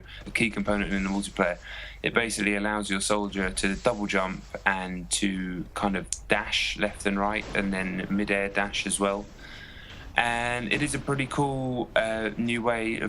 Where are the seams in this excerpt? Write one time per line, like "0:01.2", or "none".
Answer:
0:06.6